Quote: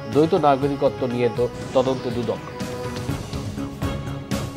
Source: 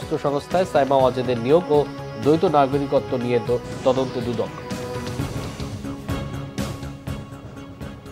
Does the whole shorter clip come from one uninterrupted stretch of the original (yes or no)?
no